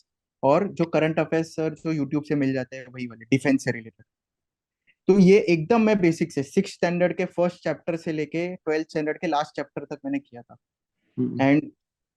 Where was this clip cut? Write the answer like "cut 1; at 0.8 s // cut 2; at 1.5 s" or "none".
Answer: none